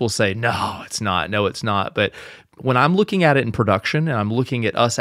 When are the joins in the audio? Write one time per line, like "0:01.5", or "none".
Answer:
none